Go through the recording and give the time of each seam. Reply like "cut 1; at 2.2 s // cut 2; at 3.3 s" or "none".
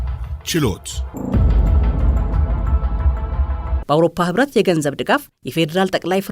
cut 1; at 1.1 s // cut 2; at 3.8 s